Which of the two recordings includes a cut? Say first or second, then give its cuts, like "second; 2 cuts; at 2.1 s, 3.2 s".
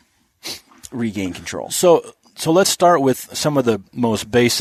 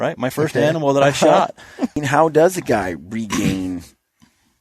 second; 1 cut; at 2.0 s